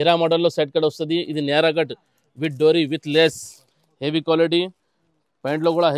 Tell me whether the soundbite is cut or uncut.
uncut